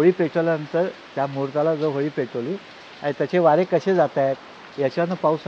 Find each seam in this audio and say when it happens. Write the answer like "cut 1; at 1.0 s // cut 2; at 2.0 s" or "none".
none